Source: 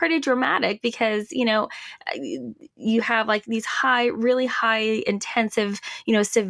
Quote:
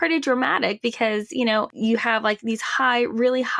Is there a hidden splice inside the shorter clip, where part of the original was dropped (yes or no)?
yes